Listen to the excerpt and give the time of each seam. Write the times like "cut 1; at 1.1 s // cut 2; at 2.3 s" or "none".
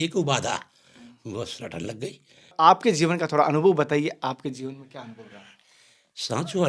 cut 1; at 2.5 s